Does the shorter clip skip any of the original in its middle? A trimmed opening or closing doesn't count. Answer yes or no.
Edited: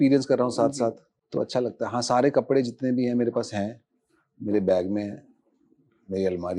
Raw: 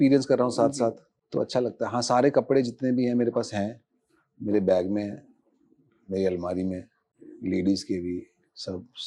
no